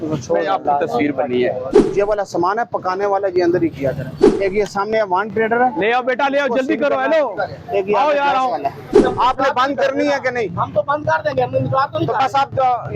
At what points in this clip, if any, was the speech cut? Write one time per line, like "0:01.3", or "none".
0:01.8
0:04.1
0:09.0